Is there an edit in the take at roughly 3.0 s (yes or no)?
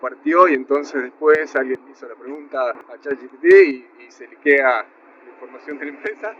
yes